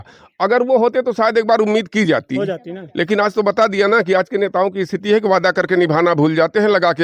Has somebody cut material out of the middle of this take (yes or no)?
no